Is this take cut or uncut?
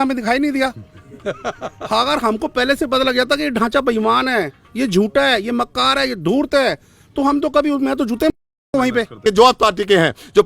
cut